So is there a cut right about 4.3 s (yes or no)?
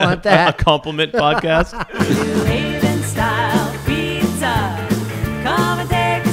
no